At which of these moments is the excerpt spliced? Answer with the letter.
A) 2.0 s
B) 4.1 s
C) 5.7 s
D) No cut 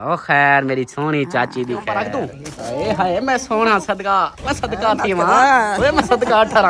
A